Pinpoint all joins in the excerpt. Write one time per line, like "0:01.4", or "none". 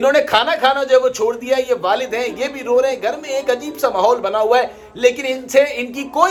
none